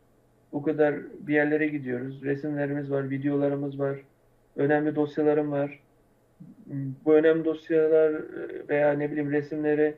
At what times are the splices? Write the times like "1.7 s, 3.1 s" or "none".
none